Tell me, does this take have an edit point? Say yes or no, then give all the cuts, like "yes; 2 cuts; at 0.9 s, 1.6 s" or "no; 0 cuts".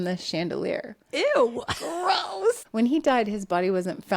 yes; 1 cut; at 2.6 s